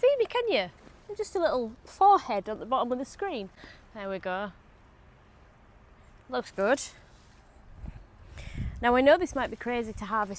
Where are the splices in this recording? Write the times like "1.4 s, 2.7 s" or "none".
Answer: none